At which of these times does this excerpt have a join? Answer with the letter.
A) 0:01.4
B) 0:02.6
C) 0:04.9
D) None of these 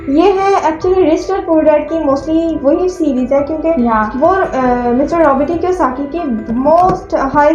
D